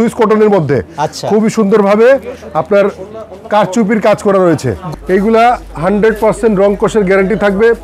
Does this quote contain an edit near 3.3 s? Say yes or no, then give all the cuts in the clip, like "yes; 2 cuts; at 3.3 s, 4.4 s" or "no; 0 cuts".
no; 1 cut; at 4.8 s